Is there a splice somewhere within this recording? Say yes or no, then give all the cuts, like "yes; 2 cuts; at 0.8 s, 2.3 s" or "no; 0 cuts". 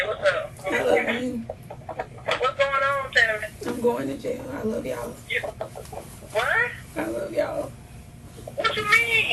no; 0 cuts